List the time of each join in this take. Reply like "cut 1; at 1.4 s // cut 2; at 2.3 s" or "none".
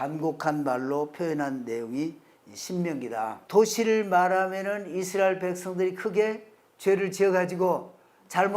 cut 1; at 3.4 s